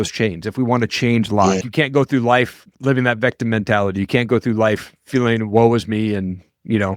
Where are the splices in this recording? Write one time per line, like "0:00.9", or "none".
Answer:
0:01.7